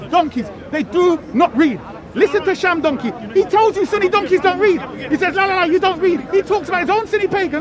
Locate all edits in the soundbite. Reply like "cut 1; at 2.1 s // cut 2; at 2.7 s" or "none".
none